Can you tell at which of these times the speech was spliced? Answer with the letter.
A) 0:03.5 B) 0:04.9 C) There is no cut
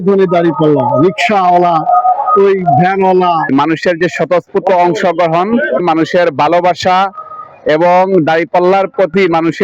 A